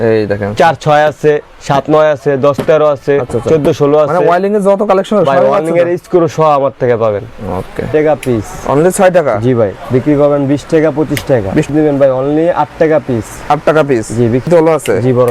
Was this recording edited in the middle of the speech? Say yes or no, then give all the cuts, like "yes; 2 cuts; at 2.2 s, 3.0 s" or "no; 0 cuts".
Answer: yes; 3 cuts; at 7.9 s, 11.7 s, 14.5 s